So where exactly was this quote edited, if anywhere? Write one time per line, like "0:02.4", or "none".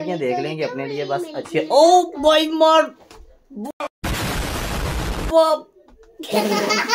none